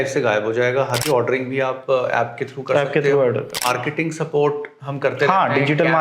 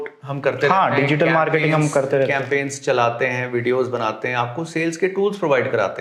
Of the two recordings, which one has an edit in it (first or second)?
first